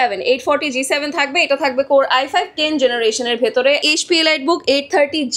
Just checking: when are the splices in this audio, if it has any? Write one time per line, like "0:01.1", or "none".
0:03.9